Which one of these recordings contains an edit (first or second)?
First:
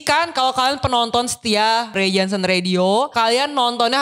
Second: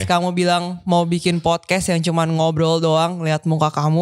first